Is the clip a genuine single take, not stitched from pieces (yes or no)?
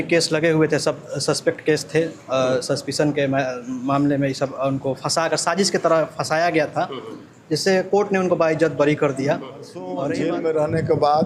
no